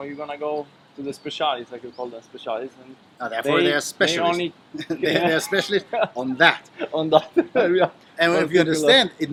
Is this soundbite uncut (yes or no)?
yes